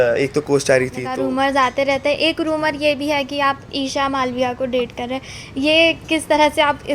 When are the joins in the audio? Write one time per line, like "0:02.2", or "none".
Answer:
0:01.0